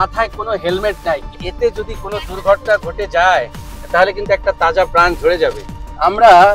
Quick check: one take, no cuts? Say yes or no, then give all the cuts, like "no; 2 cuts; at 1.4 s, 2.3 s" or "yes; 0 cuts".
no; 1 cut; at 1.4 s